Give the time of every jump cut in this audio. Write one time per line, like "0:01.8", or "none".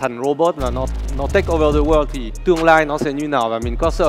0:02.3